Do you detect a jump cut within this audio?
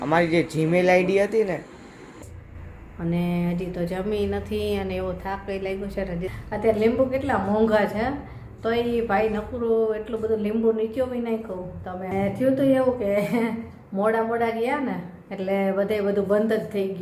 yes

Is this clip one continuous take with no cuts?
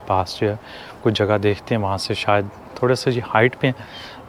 yes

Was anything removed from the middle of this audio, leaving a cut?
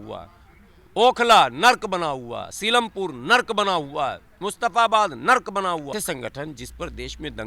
yes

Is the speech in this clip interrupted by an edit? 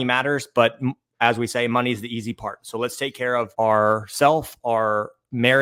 no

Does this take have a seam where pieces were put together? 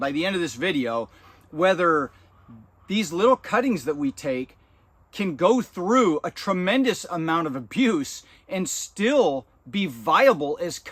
no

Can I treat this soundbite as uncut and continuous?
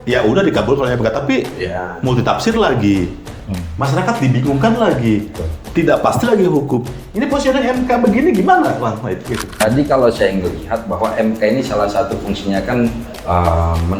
no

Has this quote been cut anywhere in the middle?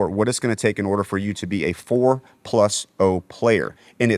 no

